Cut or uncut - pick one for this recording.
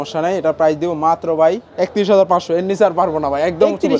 cut